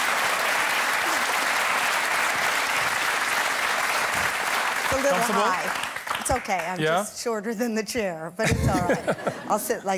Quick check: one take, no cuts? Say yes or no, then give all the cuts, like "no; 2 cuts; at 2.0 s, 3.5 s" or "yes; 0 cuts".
no; 1 cut; at 2.3 s